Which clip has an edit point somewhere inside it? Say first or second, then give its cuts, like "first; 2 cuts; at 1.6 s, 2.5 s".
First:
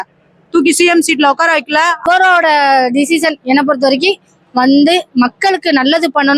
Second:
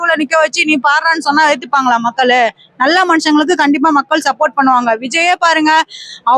first; 1 cut; at 2.0 s